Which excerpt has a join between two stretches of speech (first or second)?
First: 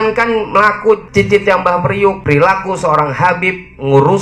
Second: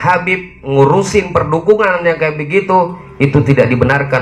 first